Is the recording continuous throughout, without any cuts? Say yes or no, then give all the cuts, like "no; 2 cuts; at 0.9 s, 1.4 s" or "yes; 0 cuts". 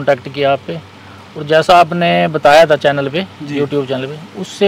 yes; 0 cuts